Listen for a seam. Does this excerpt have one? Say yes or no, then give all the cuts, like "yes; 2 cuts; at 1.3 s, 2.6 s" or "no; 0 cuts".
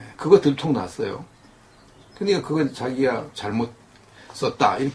yes; 1 cut; at 1.2 s